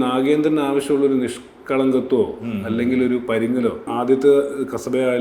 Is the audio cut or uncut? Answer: cut